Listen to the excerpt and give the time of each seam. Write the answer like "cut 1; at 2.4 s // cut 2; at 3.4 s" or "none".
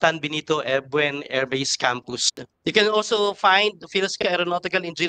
cut 1; at 2.5 s